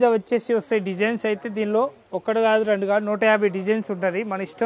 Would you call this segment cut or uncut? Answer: uncut